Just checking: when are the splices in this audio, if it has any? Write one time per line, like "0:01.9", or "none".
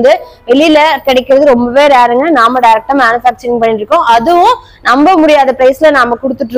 none